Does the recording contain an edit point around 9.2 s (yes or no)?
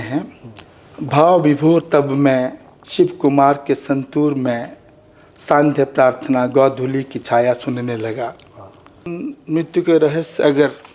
yes